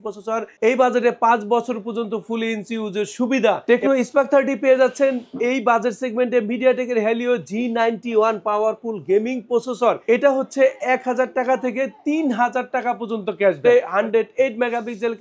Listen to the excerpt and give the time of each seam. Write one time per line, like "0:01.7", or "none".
0:03.6
0:10.0
0:13.6